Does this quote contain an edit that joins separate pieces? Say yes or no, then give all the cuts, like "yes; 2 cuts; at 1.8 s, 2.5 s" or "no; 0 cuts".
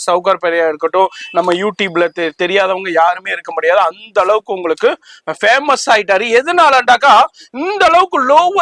no; 0 cuts